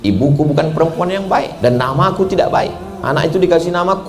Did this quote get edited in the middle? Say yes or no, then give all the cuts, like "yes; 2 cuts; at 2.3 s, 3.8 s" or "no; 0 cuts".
yes; 1 cut; at 1.5 s